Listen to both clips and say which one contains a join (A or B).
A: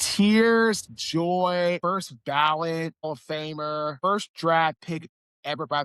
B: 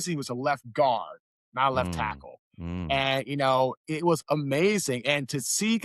A